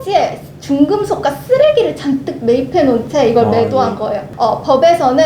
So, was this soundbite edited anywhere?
yes; 1 cut; at 4.2 s

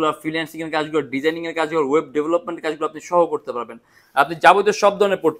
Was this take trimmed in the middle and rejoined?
no; 0 cuts

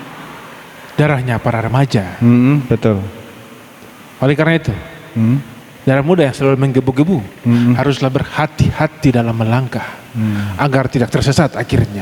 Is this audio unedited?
yes; 0 cuts

